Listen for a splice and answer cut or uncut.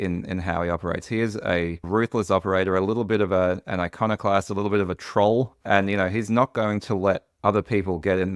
uncut